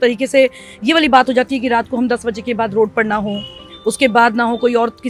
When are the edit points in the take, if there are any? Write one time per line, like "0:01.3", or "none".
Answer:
none